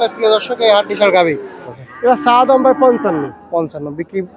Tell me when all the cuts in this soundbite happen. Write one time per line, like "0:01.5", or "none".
0:01.7